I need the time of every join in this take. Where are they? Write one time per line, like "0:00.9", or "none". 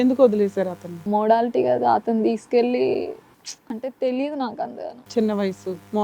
0:00.9